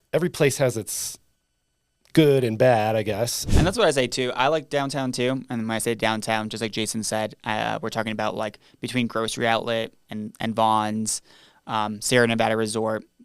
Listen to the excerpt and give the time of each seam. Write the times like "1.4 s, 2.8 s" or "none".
3.4 s